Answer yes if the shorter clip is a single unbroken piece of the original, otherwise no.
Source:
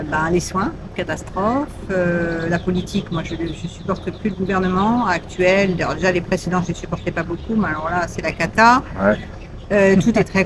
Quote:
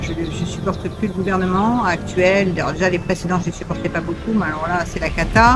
yes